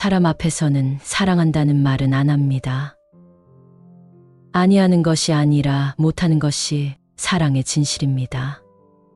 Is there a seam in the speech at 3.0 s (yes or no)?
yes